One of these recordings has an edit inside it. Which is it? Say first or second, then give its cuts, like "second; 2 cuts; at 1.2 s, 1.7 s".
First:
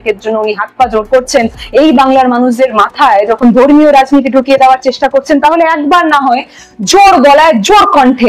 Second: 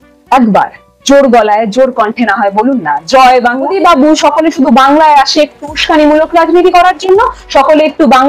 second; 1 cut; at 3.7 s